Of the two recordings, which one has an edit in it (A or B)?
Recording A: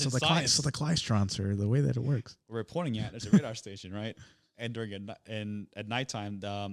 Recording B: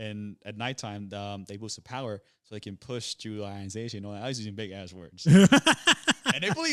A